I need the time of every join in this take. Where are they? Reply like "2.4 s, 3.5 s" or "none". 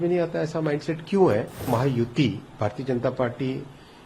1.7 s